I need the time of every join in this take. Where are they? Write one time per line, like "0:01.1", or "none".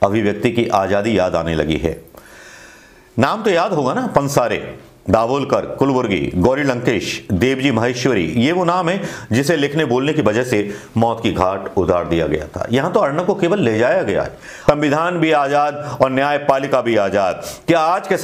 0:14.5